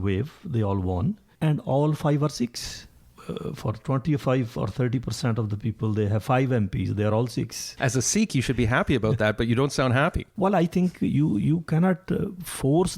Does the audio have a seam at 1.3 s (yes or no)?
yes